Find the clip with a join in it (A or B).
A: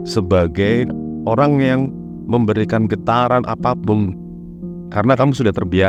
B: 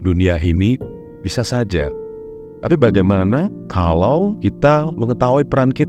B